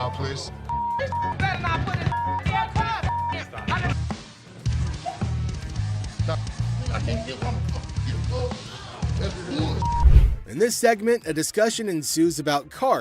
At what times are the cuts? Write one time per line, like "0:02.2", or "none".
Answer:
0:03.9